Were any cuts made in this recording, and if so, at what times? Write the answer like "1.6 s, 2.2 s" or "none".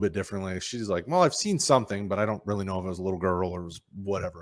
none